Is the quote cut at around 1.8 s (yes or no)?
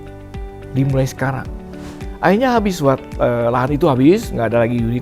yes